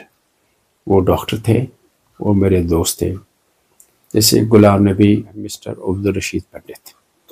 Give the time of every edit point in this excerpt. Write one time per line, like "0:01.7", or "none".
0:05.7